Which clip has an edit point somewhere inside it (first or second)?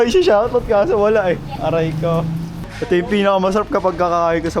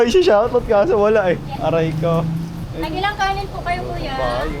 first